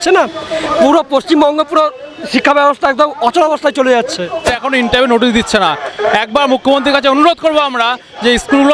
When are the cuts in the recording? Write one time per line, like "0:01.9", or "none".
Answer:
0:04.5